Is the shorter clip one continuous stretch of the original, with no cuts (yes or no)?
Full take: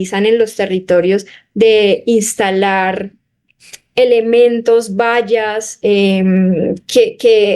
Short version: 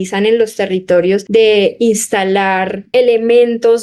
no